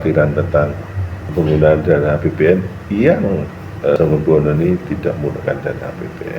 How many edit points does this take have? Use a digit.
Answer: 2